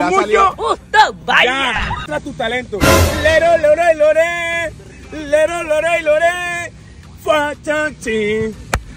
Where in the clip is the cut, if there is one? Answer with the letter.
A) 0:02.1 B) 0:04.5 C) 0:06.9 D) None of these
A